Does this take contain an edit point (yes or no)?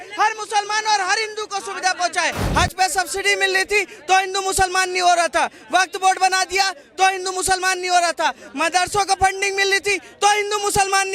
yes